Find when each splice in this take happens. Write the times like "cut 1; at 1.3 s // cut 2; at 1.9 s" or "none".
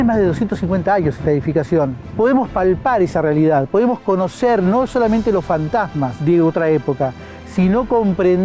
cut 1; at 2.0 s // cut 2; at 6.1 s